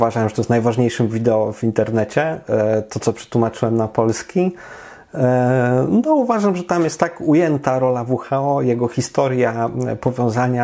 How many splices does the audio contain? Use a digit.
0